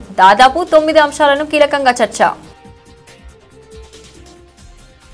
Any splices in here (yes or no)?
no